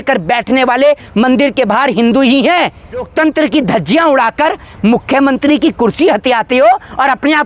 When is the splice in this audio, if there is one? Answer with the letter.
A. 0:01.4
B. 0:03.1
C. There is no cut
B